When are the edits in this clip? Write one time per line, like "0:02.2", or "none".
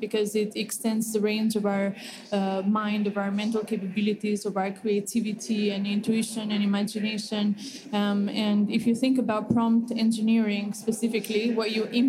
none